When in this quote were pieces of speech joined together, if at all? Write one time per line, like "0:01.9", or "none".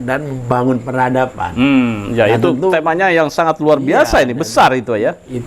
none